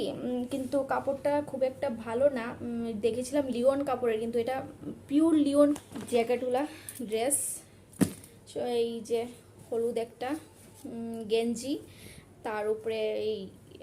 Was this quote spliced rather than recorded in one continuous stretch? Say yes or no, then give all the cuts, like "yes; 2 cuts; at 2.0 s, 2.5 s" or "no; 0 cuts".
yes; 1 cut; at 5.8 s